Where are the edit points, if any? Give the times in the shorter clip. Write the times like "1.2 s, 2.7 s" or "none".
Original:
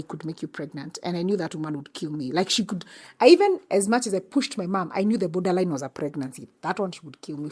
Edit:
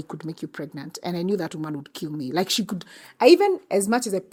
none